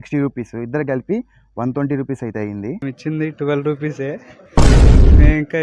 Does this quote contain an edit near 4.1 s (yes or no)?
no